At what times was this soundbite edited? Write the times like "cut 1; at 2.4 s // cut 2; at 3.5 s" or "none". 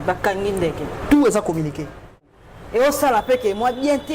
cut 1; at 2.3 s